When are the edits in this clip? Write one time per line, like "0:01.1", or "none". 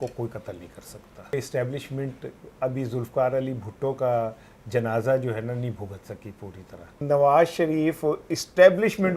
0:01.3
0:07.0